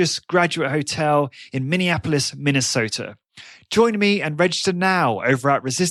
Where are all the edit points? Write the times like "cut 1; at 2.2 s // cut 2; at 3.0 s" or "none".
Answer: none